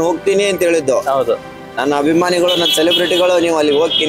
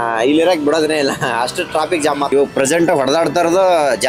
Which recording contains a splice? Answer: second; 1 cut; at 2.3 s

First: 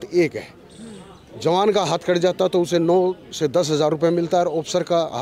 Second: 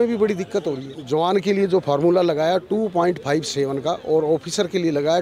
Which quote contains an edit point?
second; 1 cut; at 0.9 s

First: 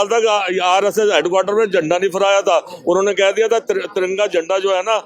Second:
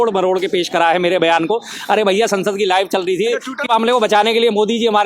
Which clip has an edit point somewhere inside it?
second; 1 cut; at 3.6 s

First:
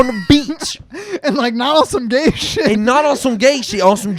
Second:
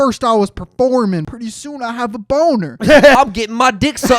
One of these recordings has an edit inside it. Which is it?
second; 2 cuts; at 1.3 s, 3.2 s

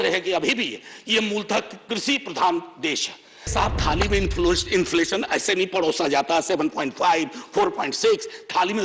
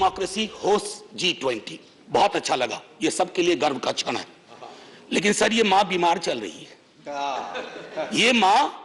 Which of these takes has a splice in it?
first; 1 cut; at 3.5 s

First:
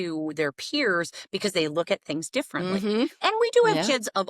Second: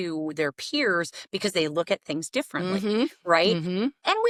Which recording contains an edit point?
first; 1 cut; at 3.2 s

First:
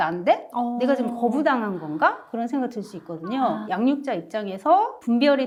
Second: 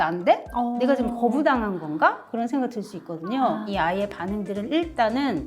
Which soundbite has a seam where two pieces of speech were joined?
second; 1 cut; at 3.7 s

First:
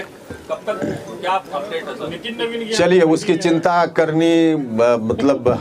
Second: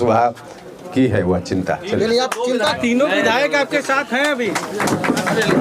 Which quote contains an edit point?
second; 1 cut; at 2.7 s

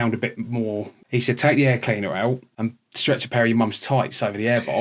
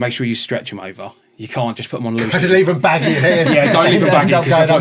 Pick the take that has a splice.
first; 2 cuts; at 1.0 s, 2.5 s

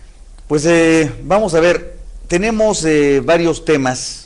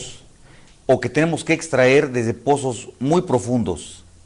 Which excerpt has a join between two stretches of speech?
first; 1 cut; at 1.2 s

